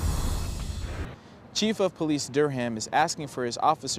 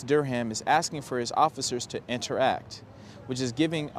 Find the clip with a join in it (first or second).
first